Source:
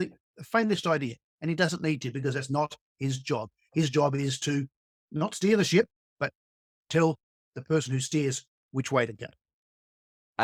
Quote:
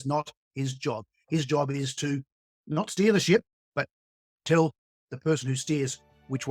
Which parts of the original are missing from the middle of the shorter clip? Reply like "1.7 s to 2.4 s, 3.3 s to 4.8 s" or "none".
none